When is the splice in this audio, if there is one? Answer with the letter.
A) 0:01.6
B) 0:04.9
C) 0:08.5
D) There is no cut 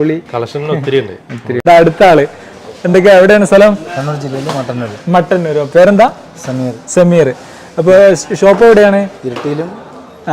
A